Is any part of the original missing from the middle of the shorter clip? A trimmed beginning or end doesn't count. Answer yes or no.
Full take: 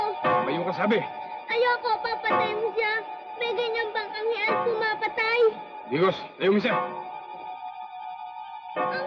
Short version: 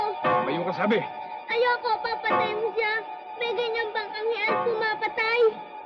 no